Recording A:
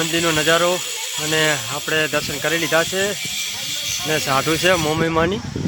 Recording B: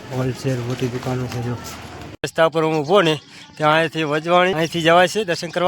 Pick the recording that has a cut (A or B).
B